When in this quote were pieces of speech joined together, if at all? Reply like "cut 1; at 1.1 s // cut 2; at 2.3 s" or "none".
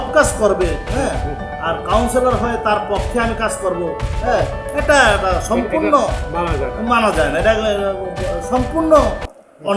none